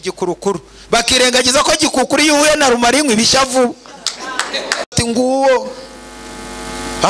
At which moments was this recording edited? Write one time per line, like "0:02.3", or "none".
0:04.9